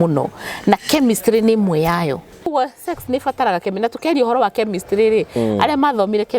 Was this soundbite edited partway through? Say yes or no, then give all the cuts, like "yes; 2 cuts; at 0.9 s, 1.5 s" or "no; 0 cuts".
yes; 1 cut; at 2.5 s